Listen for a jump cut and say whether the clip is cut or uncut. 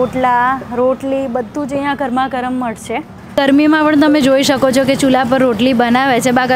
cut